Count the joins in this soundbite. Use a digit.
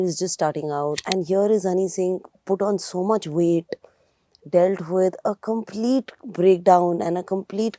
1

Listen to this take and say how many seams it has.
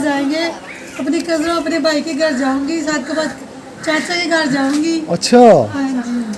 0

